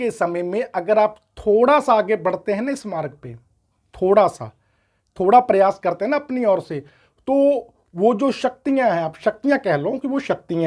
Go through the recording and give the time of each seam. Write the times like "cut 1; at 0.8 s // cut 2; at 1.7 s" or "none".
none